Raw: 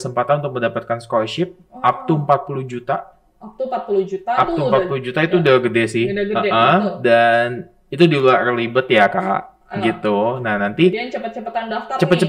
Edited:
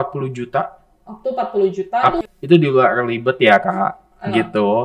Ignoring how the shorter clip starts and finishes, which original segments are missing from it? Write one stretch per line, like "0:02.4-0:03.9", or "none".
0:04.5-0:07.7